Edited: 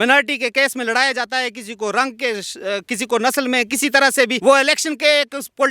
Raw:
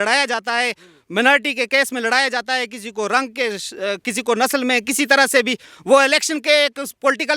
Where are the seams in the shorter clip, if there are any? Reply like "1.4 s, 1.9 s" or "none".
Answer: 4.4 s